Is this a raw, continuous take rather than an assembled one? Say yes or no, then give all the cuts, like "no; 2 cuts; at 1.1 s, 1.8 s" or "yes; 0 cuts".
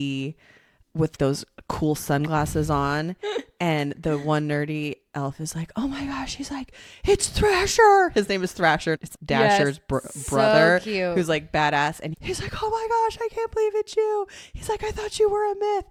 yes; 0 cuts